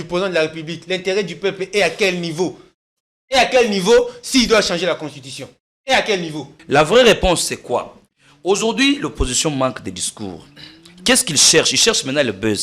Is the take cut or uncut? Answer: cut